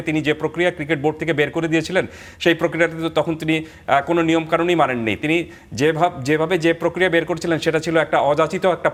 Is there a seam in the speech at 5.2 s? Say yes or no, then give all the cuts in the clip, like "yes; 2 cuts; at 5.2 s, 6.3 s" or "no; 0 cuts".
no; 0 cuts